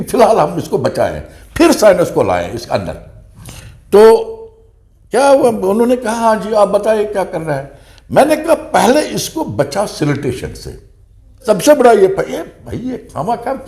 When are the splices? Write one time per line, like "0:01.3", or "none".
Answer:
0:11.4